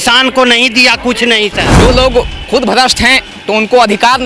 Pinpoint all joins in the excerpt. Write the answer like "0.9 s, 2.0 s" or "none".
1.7 s